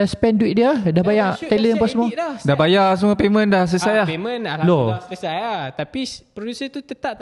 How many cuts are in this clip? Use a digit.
0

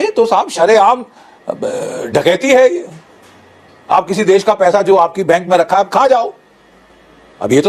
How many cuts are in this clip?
0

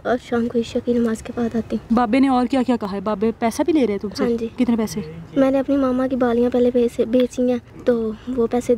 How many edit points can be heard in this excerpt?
2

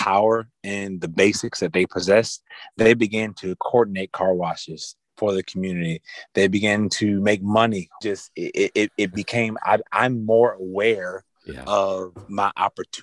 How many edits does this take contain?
1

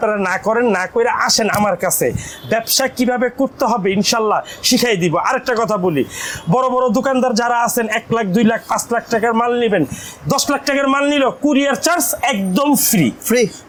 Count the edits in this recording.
0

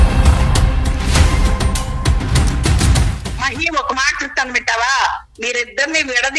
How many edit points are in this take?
1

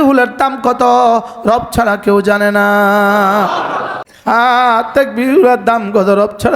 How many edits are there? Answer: 1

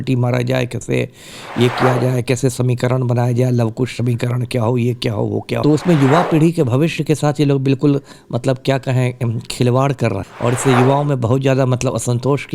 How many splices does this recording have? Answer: 2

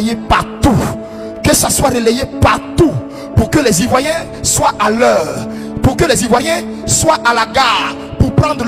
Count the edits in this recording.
0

